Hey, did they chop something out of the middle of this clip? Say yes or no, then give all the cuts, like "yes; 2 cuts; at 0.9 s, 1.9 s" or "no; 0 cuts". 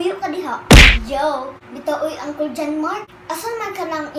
no; 0 cuts